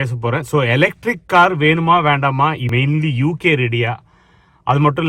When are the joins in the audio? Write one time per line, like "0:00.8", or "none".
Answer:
0:02.6

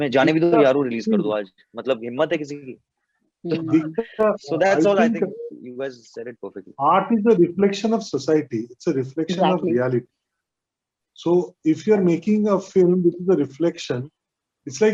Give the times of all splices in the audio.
none

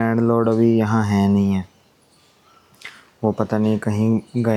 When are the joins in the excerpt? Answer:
none

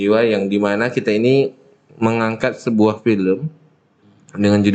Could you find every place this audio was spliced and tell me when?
none

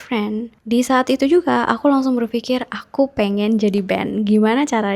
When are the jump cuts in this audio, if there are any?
none

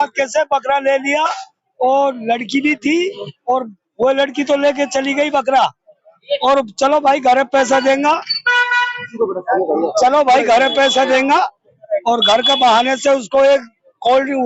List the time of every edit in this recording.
none

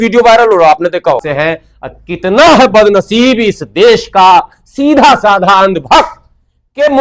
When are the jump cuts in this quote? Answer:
0:01.3

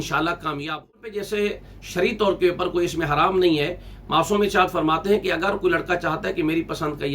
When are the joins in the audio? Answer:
0:01.1

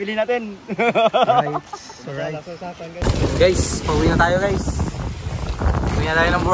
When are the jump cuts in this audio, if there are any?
0:03.0

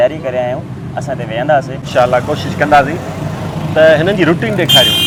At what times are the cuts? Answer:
none

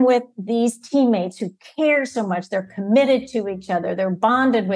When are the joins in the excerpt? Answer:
none

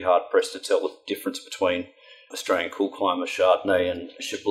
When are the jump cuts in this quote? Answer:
none

